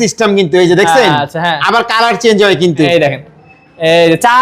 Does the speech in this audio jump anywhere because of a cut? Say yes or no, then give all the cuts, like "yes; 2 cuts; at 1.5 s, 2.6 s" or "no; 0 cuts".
yes; 1 cut; at 2.9 s